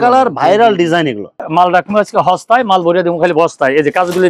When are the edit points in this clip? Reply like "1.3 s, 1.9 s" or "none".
1.4 s